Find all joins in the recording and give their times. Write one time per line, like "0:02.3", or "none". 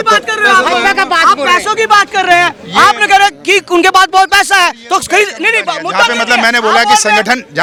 none